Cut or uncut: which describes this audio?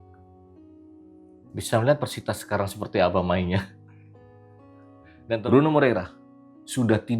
cut